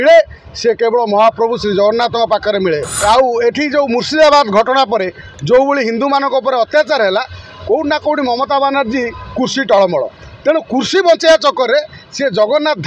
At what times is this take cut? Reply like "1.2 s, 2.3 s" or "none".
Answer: 2.9 s